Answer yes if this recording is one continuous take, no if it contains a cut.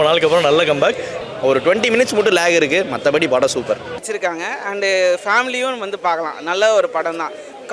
no